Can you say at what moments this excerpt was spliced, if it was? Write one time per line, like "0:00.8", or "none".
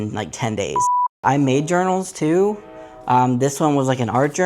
0:01.2